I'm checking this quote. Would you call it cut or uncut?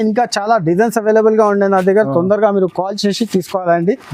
uncut